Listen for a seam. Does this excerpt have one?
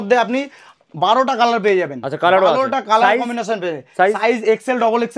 no; 0 cuts

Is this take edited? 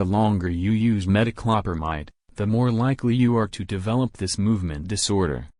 no; 0 cuts

